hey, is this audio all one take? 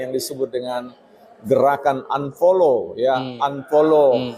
yes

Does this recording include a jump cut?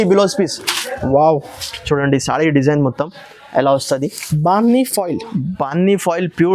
no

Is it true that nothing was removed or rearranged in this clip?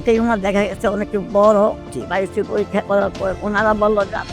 no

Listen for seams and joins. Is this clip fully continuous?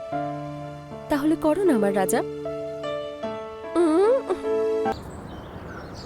no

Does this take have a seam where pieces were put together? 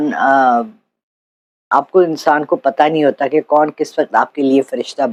no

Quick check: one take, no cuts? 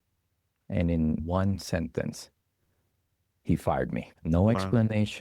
no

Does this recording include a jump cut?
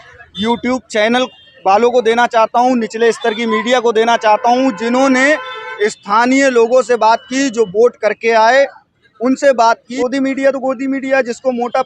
yes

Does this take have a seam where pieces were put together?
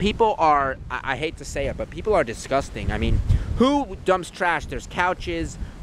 no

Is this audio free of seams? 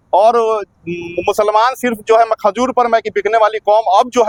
yes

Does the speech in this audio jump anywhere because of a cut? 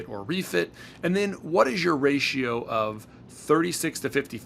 no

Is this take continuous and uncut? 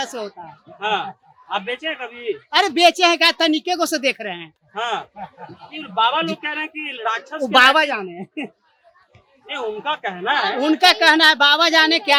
yes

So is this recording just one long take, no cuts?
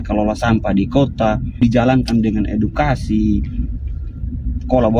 no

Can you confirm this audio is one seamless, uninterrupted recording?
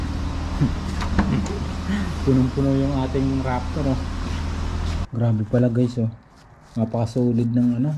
no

